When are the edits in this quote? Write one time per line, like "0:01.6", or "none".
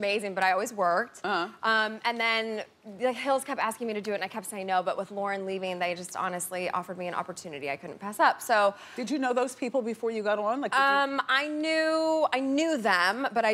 none